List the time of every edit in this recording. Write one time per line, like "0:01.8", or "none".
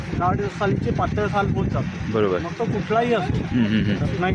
none